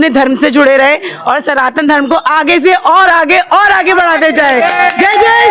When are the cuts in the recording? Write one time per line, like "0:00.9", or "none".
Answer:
none

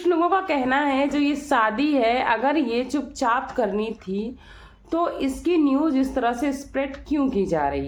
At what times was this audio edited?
none

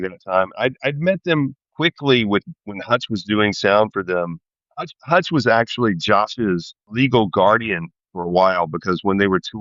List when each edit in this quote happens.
none

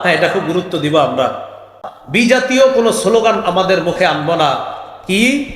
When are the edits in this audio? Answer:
0:01.8

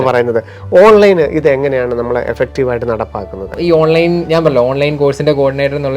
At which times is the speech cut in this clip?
0:03.5

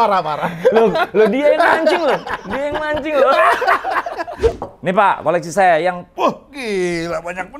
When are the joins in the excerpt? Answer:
0:04.6

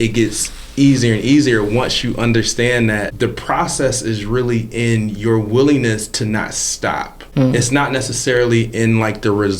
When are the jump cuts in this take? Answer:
0:03.1
0:07.2

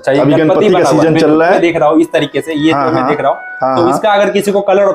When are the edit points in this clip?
0:01.6

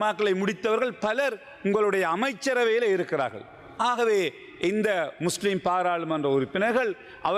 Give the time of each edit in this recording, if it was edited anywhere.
none

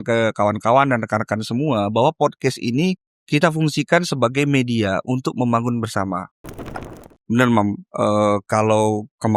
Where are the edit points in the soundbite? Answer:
0:06.8

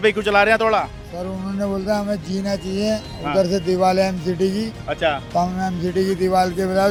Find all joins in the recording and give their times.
none

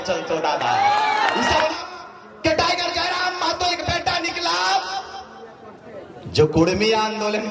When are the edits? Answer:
0:01.8

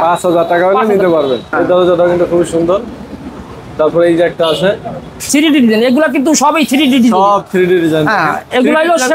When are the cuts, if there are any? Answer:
0:01.5
0:05.2

